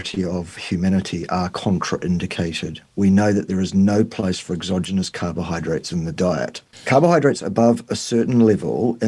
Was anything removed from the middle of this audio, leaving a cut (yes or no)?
yes